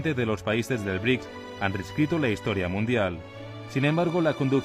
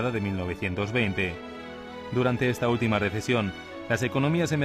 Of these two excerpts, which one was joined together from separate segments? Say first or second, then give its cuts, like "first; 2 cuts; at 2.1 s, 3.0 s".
second; 1 cut; at 1.2 s